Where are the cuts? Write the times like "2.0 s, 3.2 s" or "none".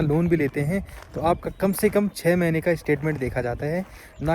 none

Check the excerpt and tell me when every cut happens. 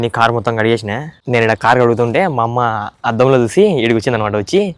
1.1 s

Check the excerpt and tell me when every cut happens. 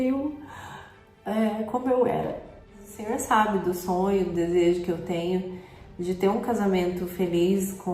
2.9 s

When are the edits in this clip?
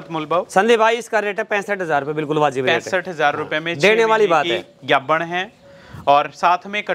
none

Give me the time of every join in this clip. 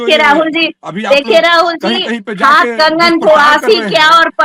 none

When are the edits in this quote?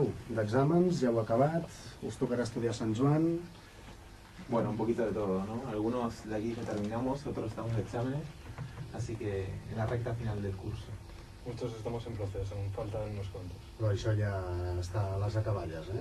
12.2 s

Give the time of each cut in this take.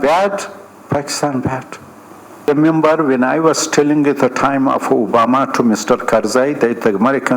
2.5 s

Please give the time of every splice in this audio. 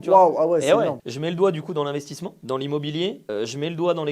1.0 s

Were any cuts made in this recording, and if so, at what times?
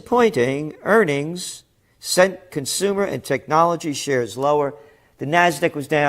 4.8 s

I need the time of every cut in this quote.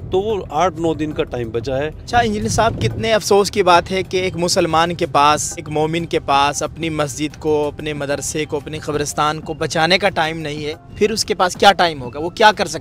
2.0 s, 5.7 s, 10.8 s

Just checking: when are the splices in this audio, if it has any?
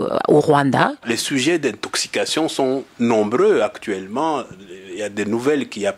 1.1 s

